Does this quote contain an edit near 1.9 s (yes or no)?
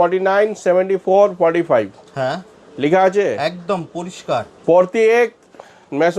no